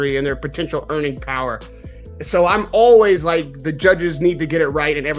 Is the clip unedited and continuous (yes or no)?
yes